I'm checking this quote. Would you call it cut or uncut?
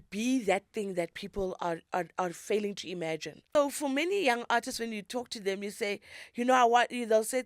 cut